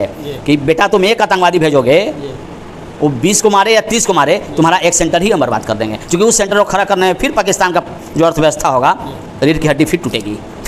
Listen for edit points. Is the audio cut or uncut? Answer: uncut